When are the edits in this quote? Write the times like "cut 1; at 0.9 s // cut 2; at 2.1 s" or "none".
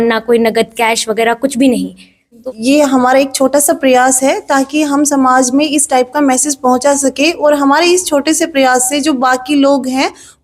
cut 1; at 2.4 s